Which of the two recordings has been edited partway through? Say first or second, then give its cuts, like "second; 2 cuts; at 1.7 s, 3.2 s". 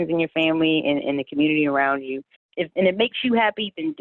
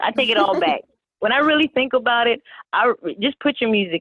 first; 1 cut; at 2.5 s